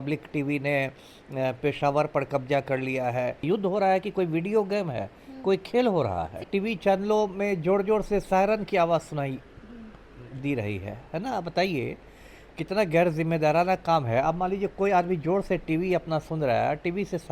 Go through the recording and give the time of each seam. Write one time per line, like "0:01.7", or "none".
0:03.4
0:06.5

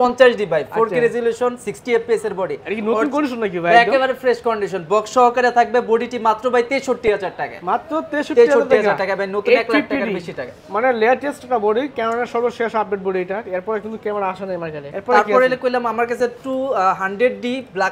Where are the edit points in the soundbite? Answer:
none

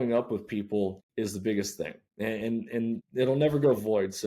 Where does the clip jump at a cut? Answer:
0:01.0
0:02.0
0:03.1

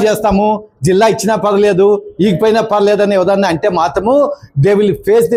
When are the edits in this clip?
none

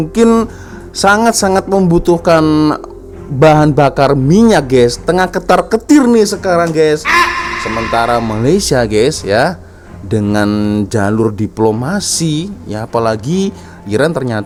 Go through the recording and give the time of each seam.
none

